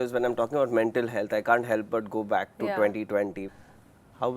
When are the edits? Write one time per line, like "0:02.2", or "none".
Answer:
0:03.5